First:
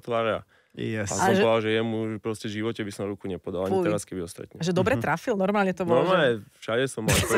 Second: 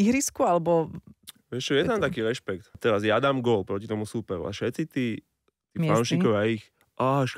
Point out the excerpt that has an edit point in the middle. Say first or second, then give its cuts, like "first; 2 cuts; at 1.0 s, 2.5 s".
second; 1 cut; at 2.6 s